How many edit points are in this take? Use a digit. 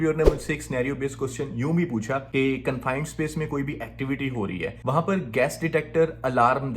2